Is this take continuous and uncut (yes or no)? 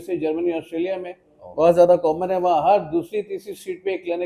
yes